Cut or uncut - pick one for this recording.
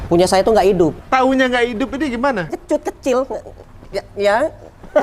cut